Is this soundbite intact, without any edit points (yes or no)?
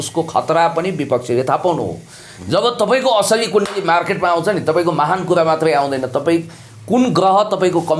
yes